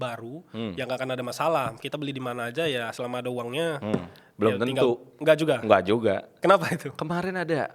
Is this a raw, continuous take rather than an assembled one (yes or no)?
yes